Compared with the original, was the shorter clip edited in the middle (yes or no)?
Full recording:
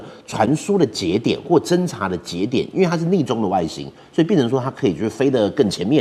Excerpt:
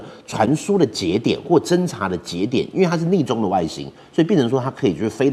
no